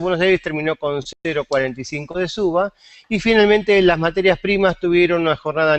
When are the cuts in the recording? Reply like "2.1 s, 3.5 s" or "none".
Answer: none